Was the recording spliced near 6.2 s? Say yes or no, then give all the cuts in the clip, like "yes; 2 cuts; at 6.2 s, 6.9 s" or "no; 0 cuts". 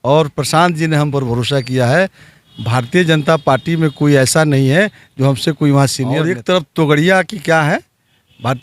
yes; 1 cut; at 6.2 s